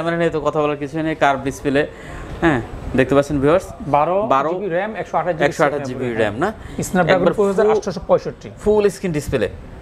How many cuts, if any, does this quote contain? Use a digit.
0